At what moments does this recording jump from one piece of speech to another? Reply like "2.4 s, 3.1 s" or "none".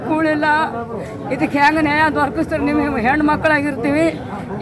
none

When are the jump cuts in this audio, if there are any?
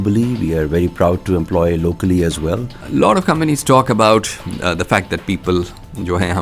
2.7 s

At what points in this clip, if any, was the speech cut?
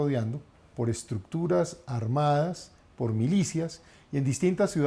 none

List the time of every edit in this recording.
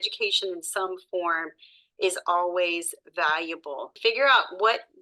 3.8 s

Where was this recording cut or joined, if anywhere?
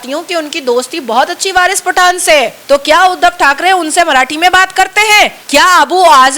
2.6 s, 5.4 s

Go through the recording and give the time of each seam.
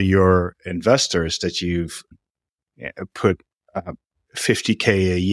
2.1 s

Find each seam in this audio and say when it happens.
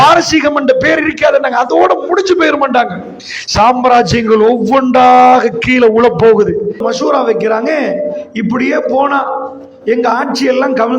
6.8 s, 8.2 s

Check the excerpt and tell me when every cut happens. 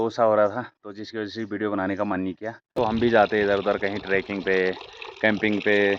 2.7 s

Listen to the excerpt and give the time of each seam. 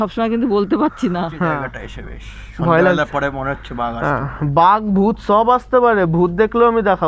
1.7 s

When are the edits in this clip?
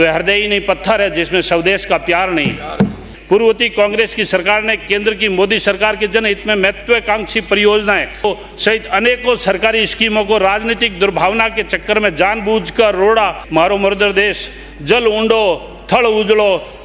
3.0 s, 8.2 s, 13.4 s

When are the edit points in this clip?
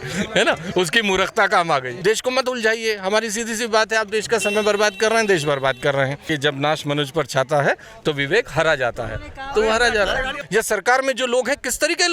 1.9 s, 6.3 s, 10.4 s

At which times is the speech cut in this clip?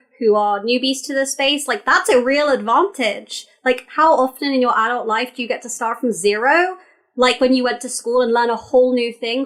none

